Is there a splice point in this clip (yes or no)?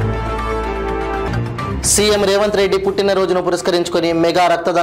yes